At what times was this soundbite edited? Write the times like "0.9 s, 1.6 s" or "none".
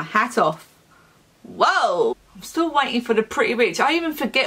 2.1 s